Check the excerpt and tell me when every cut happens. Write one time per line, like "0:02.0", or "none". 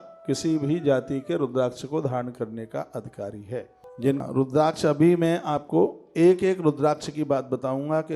0:04.2